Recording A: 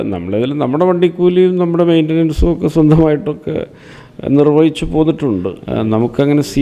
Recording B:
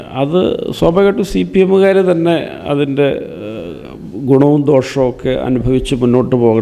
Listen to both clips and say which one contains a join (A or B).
A